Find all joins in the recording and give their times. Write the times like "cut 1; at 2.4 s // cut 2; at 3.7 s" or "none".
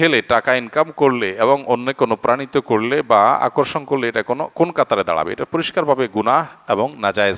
none

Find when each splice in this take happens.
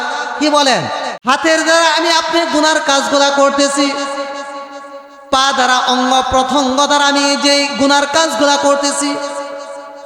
cut 1; at 1.1 s

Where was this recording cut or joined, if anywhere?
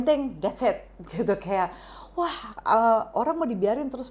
none

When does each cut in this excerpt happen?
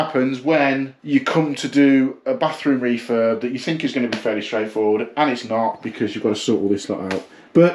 cut 1; at 0.9 s

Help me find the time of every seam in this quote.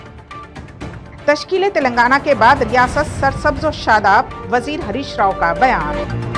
cut 1; at 1.0 s

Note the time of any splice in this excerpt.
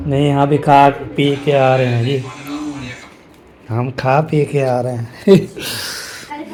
none

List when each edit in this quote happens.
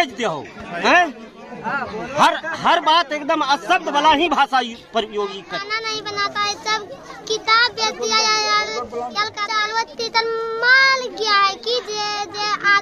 cut 1; at 5.5 s // cut 2; at 9.4 s

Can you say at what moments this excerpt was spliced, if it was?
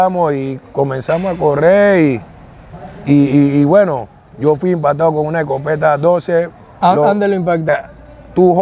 cut 1; at 7.7 s

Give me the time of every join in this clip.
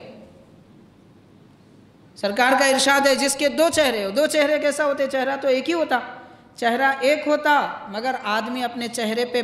none

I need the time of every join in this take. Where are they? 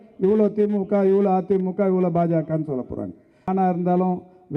cut 1; at 3.5 s

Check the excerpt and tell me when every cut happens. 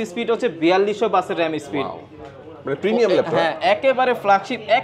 none

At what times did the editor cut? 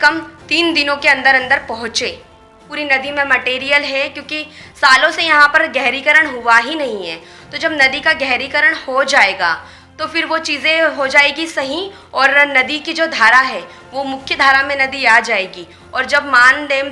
cut 1; at 2.6 s

